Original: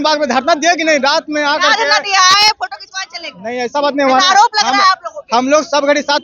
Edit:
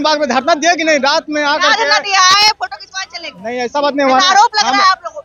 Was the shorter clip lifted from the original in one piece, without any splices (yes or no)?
yes